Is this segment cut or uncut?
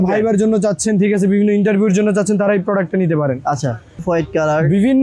cut